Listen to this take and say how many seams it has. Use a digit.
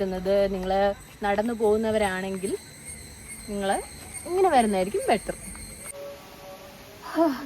1